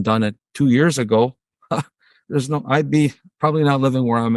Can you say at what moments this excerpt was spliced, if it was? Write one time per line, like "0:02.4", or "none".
none